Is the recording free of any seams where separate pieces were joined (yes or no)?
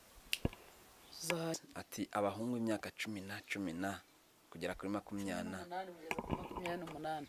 no